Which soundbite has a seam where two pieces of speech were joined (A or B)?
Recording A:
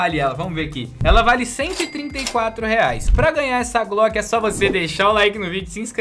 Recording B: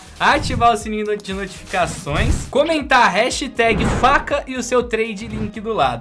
A